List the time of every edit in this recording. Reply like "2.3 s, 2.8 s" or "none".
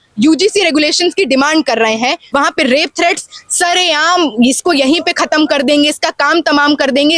2.2 s